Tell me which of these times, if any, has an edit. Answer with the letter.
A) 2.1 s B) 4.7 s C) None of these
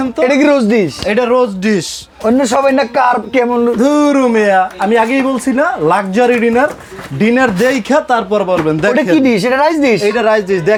C